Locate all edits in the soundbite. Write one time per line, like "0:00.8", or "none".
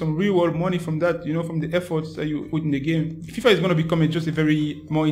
0:02.5
0:03.3